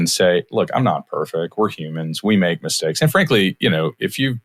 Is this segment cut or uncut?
uncut